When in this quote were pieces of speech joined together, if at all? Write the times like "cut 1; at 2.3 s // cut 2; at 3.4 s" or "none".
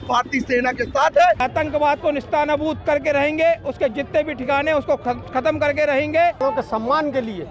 cut 1; at 1.4 s // cut 2; at 6.4 s